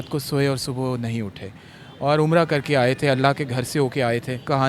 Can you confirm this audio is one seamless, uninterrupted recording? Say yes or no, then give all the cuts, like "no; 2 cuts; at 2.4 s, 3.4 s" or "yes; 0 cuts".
yes; 0 cuts